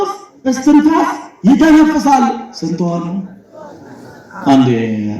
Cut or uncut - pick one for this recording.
uncut